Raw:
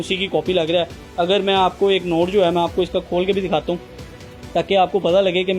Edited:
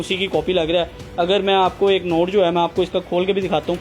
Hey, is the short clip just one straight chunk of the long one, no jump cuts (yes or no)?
yes